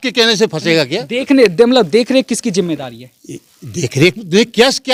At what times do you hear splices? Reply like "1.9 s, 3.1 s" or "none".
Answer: none